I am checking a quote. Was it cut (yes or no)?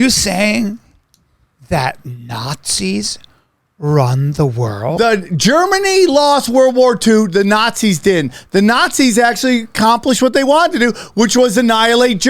yes